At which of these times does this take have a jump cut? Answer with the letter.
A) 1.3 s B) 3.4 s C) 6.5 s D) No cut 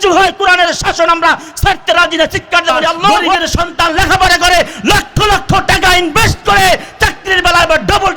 B